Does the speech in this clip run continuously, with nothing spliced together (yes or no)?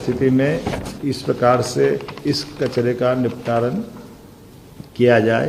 yes